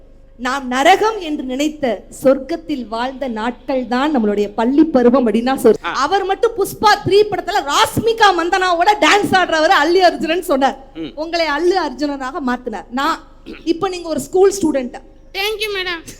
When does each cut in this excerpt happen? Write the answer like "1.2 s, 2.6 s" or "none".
5.8 s

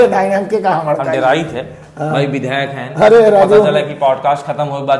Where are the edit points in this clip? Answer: none

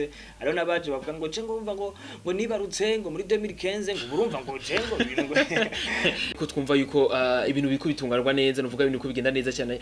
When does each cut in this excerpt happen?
6.4 s

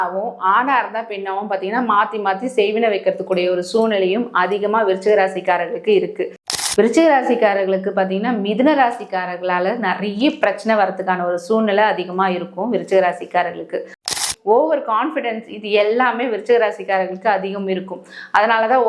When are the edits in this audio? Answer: 6.6 s, 14.1 s

